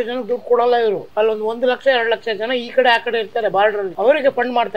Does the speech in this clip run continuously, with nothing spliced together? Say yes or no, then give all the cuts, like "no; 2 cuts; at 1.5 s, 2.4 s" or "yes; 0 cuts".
no; 2 cuts; at 1.0 s, 3.9 s